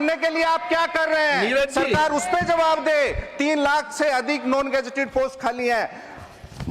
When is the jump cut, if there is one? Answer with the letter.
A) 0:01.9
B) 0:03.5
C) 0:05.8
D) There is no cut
D